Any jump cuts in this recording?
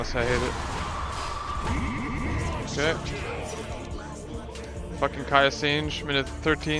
no; 0 cuts

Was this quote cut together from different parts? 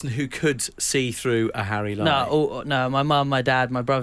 no; 0 cuts

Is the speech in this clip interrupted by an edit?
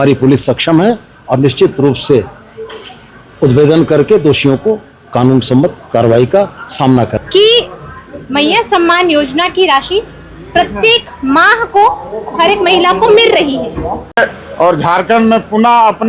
yes; 2 cuts; at 7.1 s, 14.1 s

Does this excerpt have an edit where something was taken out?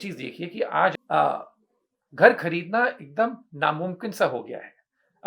yes; 1 cut; at 1.0 s

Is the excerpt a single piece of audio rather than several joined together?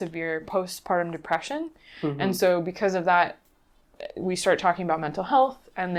yes; 0 cuts

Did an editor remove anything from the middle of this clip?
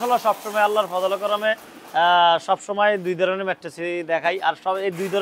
no; 0 cuts

